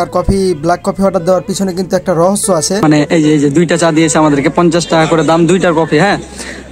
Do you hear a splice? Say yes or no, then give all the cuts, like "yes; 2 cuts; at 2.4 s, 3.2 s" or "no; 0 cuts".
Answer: yes; 1 cut; at 2.8 s